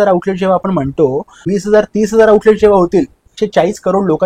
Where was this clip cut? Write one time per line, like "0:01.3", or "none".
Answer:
0:01.4
0:03.3